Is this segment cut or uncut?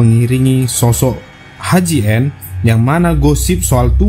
uncut